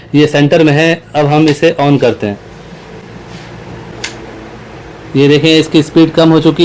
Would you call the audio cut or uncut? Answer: cut